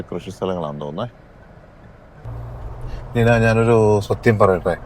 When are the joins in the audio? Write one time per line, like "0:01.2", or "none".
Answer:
0:02.2